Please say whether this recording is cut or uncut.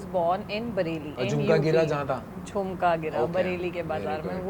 cut